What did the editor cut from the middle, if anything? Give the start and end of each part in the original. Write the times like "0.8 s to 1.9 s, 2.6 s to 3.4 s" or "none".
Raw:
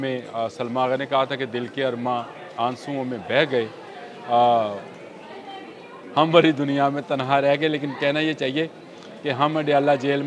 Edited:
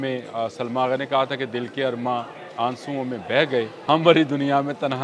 3.8 s to 6.0 s